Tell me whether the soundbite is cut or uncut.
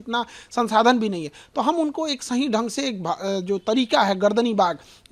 uncut